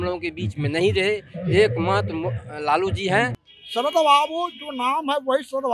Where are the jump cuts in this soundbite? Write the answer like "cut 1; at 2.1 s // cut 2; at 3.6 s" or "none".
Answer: cut 1; at 3.4 s